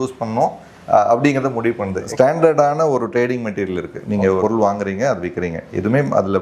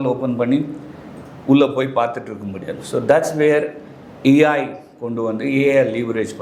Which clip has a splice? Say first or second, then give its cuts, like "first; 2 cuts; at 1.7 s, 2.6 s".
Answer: first; 2 cuts; at 2.0 s, 4.4 s